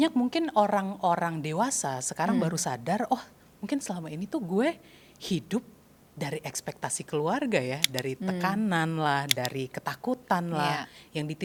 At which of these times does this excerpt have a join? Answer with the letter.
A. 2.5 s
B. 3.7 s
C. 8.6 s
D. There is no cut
D